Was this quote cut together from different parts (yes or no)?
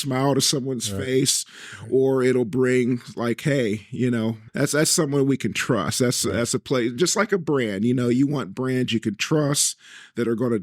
yes